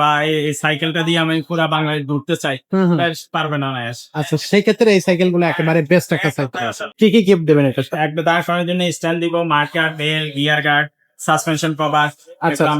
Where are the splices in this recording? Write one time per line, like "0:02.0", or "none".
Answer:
0:06.9